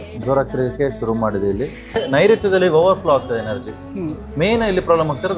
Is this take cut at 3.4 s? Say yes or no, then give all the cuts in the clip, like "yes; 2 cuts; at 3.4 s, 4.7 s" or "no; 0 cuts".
no; 1 cut; at 2.0 s